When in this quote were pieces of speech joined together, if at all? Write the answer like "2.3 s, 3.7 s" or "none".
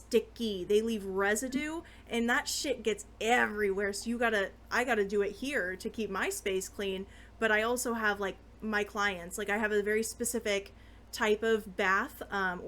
none